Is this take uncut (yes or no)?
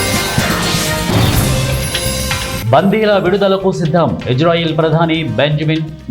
no